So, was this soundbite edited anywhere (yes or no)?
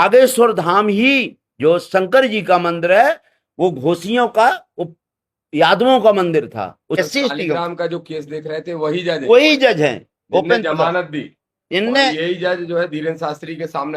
yes